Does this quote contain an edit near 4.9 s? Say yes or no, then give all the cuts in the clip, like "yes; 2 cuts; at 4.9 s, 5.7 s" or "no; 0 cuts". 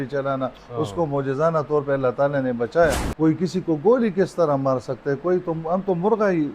no; 1 cut; at 3.1 s